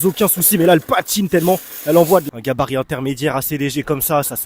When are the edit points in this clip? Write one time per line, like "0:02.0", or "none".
0:02.3